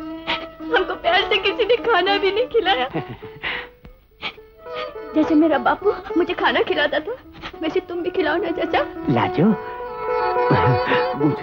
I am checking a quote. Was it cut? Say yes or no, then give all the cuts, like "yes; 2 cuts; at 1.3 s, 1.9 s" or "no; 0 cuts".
no; 0 cuts